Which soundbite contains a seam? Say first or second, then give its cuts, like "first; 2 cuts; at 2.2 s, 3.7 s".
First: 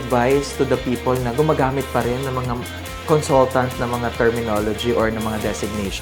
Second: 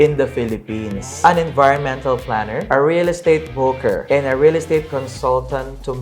second; 3 cuts; at 1.0 s, 2.6 s, 4.0 s